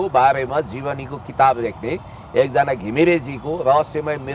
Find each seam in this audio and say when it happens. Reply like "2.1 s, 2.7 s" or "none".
none